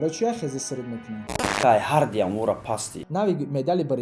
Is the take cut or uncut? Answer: cut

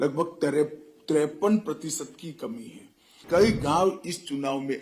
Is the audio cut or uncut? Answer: cut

